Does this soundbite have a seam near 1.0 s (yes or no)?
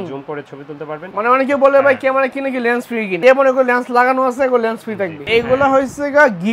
yes